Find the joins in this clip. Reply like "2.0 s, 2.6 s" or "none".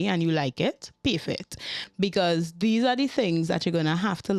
none